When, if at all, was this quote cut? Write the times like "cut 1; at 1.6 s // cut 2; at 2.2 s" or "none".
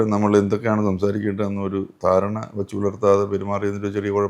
none